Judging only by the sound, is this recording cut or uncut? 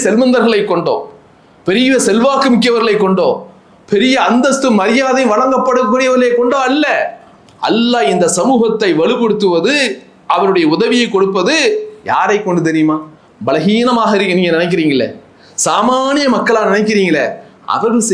uncut